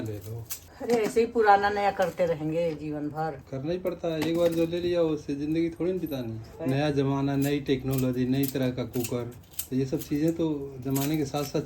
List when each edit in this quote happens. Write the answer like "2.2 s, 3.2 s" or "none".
3.5 s, 6.5 s